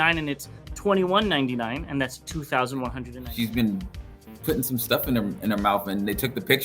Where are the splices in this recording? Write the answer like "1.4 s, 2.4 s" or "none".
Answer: 3.1 s